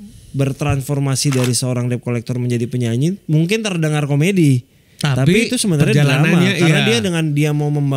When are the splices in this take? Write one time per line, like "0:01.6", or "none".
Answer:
none